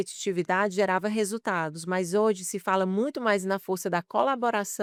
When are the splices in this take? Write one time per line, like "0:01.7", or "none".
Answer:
none